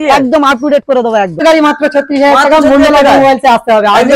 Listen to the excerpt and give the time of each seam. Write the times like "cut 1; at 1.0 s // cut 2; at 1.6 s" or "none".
cut 1; at 1.4 s